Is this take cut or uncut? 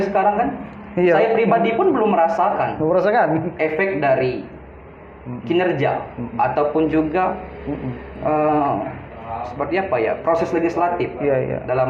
uncut